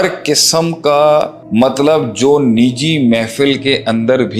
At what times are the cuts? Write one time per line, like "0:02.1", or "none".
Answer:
0:01.4

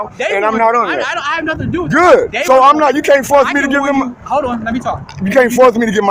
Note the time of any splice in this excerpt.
none

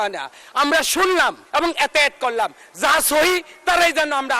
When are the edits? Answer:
0:01.4

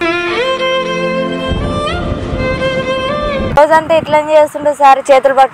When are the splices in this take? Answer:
0:03.6

